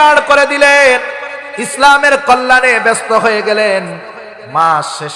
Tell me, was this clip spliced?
no; 0 cuts

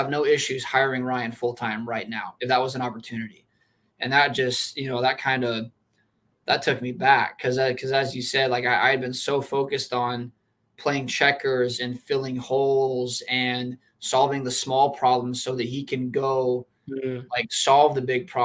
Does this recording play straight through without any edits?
no; 1 cut; at 2.2 s

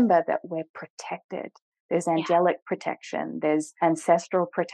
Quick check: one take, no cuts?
no; 1 cut; at 3.7 s

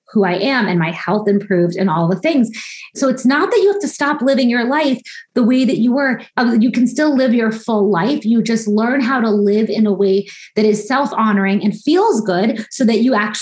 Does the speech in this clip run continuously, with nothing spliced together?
no; 2 cuts; at 3.0 s, 6.2 s

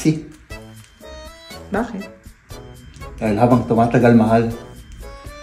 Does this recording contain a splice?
no; 0 cuts

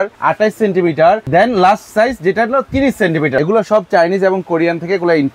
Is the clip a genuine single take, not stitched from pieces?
no; 2 cuts; at 1.2 s, 3.3 s

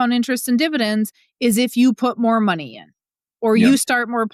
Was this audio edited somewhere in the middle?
no; 0 cuts

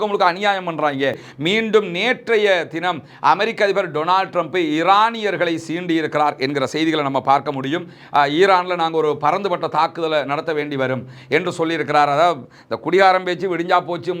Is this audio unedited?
no; 1 cut; at 1.3 s

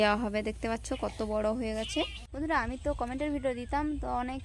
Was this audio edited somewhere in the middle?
yes; 1 cut; at 2.3 s

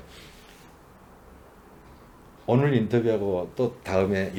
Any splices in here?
no; 0 cuts

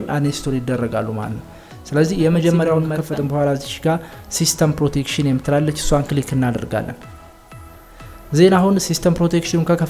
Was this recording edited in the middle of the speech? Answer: yes; 1 cut; at 3.0 s

